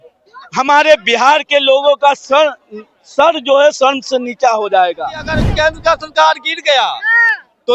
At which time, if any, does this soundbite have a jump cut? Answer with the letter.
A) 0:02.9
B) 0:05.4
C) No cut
B